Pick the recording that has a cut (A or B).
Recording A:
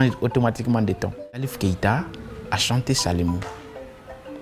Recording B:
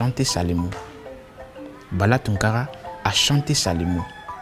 A